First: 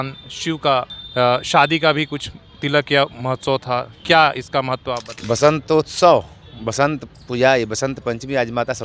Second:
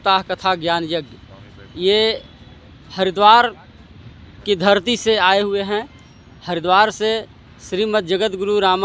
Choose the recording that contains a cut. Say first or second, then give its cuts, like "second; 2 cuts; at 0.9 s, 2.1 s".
first; 2 cuts; at 1.0 s, 5.1 s